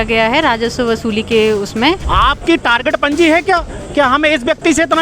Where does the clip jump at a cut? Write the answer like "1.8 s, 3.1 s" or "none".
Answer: 2.0 s